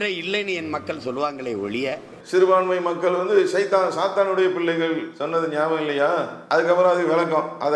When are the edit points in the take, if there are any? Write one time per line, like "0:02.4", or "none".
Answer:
0:02.1
0:05.1
0:06.4